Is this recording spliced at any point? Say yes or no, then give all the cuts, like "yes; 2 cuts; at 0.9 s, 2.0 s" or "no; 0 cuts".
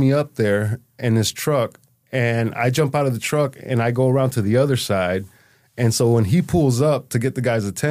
no; 0 cuts